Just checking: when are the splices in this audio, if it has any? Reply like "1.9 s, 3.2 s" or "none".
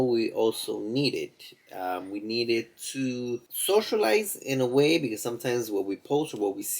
3.5 s